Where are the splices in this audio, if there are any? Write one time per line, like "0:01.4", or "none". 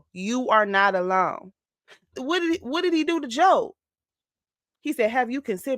0:02.0